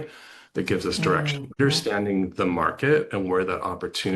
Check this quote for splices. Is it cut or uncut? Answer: cut